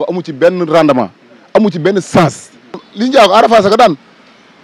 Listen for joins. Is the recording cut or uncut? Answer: cut